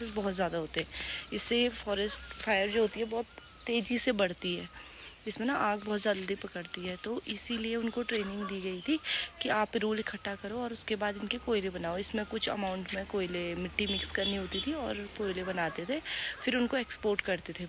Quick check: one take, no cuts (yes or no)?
yes